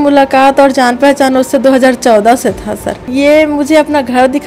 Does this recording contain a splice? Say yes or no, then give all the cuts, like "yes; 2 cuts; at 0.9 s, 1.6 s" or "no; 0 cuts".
yes; 1 cut; at 3.1 s